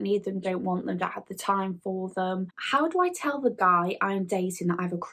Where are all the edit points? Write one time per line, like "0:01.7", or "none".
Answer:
0:02.6